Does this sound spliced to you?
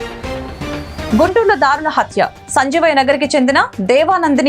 yes; 1 cut; at 1.1 s

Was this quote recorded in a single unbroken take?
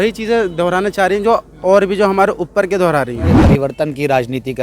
no; 1 cut; at 3.4 s

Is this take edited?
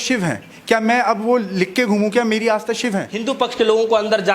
yes; 1 cut; at 3.1 s

